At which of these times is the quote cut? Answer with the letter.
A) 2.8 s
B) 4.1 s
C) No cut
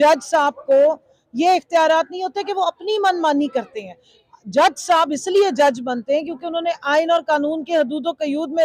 C